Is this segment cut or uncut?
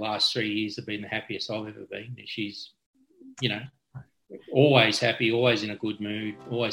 uncut